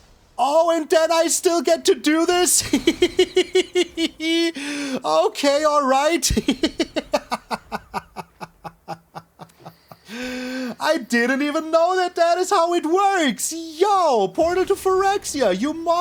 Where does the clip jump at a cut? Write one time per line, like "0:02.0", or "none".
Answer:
none